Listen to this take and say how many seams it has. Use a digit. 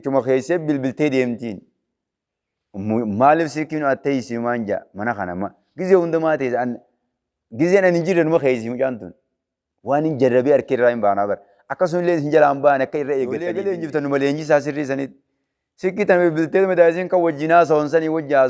1